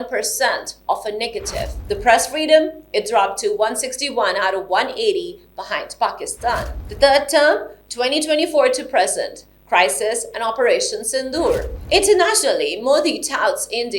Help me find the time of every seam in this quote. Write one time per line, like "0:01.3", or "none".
0:01.8
0:06.8
0:11.7